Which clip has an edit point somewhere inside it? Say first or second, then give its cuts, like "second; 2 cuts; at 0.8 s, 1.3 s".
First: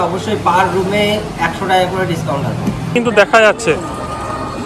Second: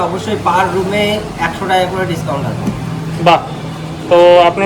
first; 1 cut; at 2.9 s